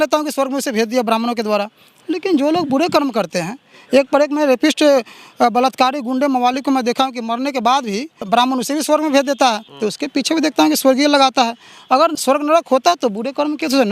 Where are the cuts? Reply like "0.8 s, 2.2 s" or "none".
8.2 s, 9.7 s, 12.1 s